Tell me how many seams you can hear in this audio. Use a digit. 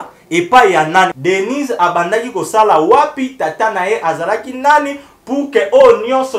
1